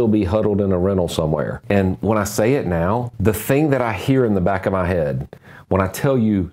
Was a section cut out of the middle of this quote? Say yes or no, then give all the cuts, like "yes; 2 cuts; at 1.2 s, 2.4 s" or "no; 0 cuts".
yes; 2 cuts; at 1.6 s, 3.1 s